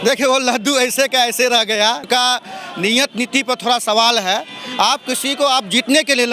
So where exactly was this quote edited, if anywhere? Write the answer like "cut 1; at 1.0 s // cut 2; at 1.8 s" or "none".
cut 1; at 2.0 s